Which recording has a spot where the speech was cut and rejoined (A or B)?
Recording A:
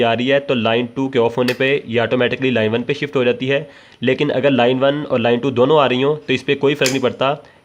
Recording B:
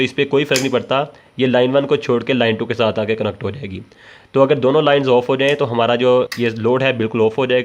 B